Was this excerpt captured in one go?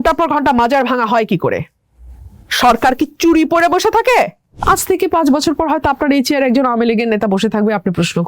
no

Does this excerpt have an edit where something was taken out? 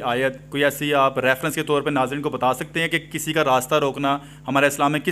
no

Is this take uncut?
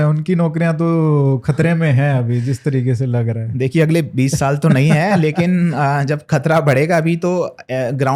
yes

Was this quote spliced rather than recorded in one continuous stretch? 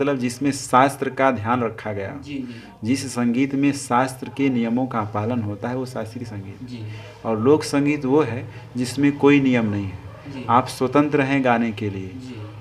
no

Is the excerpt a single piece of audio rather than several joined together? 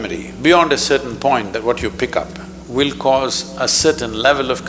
yes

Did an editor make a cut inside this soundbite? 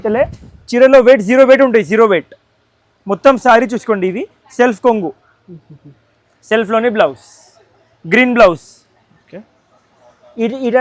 no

